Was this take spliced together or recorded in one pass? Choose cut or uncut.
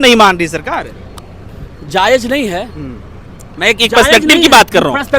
uncut